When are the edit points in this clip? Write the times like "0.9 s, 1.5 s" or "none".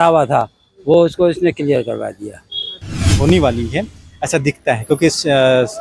3.0 s